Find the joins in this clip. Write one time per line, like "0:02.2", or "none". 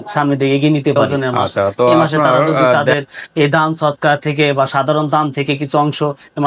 0:02.8